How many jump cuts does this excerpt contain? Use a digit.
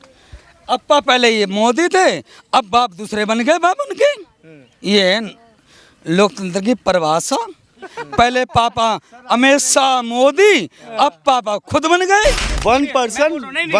1